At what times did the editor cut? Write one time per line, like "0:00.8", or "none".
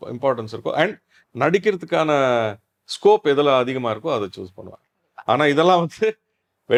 none